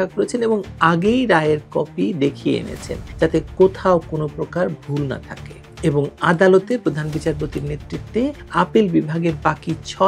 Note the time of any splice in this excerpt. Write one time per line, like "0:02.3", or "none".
none